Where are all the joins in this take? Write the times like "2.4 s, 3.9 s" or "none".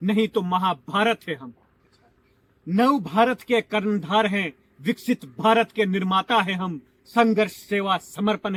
none